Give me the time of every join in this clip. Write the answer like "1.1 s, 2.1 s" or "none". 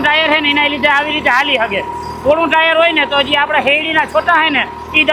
none